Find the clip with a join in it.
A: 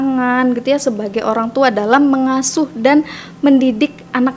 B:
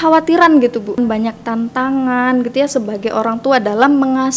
B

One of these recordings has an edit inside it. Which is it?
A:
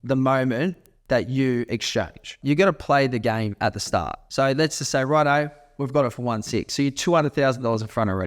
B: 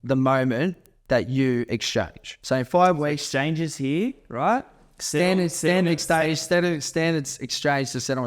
A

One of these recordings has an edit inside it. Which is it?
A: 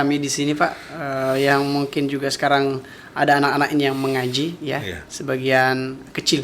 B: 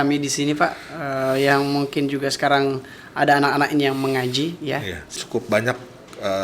B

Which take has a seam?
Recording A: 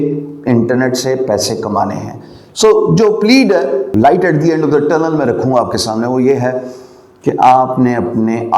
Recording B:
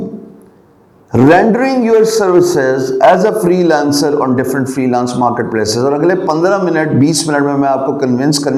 A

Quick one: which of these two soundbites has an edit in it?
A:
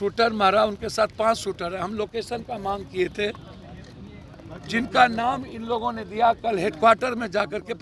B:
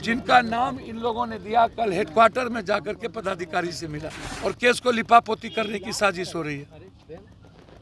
B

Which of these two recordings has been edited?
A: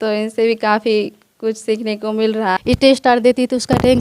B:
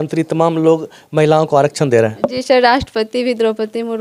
A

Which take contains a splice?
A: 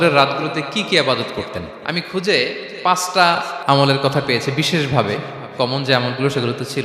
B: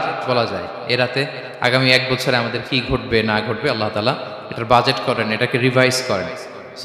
A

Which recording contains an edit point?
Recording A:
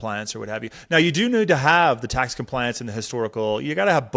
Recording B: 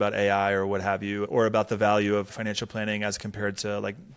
B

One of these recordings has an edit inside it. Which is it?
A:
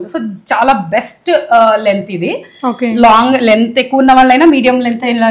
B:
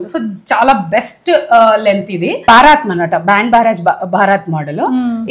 B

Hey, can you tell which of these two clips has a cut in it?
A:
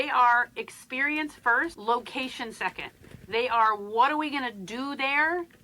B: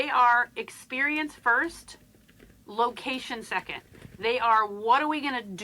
A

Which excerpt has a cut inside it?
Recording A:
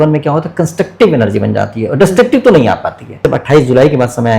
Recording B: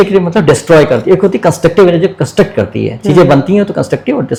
A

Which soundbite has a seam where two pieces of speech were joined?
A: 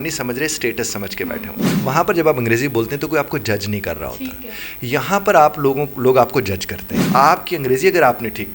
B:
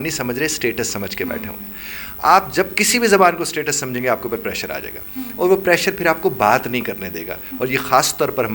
A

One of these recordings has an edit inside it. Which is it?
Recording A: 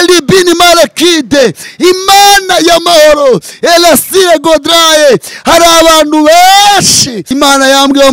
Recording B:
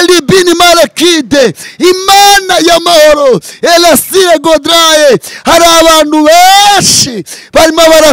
A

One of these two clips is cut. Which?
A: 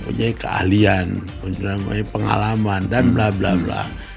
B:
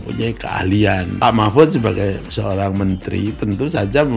B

